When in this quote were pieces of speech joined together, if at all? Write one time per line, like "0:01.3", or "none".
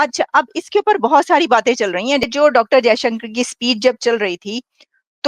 0:02.3